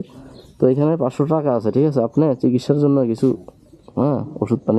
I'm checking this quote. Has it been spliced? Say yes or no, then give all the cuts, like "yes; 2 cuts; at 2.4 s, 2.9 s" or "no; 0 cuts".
no; 0 cuts